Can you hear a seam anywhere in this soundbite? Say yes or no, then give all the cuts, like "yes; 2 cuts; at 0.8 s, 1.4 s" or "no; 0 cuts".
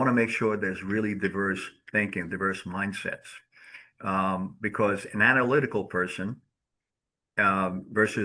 no; 0 cuts